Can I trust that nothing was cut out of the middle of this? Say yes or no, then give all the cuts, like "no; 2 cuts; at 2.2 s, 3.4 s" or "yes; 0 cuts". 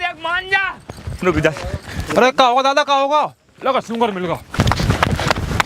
no; 2 cuts; at 2.0 s, 4.5 s